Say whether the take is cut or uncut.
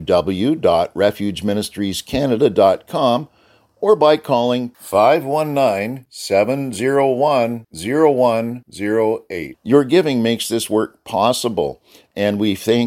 uncut